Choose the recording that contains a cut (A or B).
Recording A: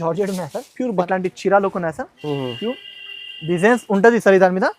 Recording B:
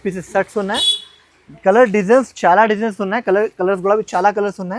A